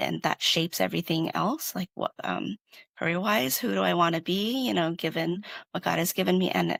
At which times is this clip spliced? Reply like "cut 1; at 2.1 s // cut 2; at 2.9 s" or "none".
none

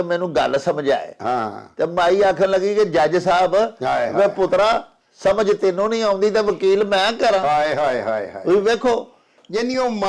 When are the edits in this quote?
none

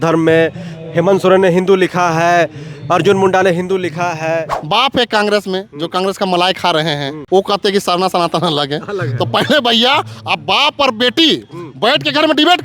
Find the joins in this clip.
cut 1; at 4.6 s // cut 2; at 7.1 s

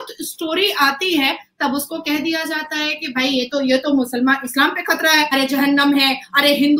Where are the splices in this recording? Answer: cut 1; at 5.3 s

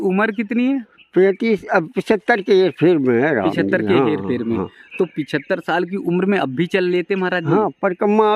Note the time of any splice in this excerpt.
none

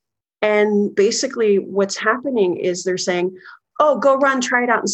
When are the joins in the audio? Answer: cut 1; at 0.9 s

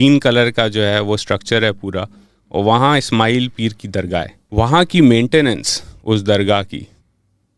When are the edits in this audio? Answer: cut 1; at 4.4 s

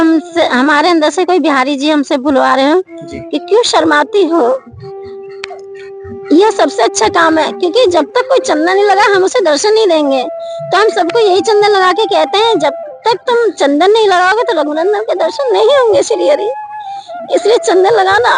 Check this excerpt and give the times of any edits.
none

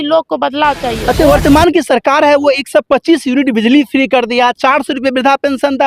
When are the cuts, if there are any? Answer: cut 1; at 1.0 s

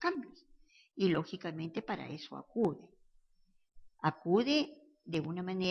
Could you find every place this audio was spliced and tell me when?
cut 1; at 3.0 s

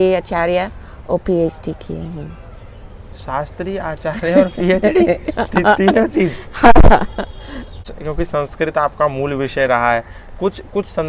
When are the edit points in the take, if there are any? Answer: cut 1; at 7.9 s

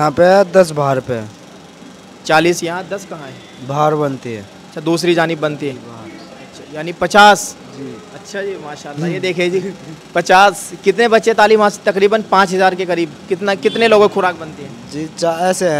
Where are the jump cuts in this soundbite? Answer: none

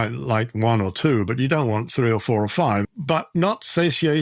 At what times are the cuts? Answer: none

